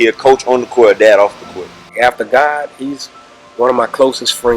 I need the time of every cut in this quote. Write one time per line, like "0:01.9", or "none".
0:01.9

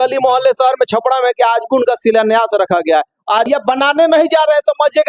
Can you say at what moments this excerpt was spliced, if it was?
0:03.5

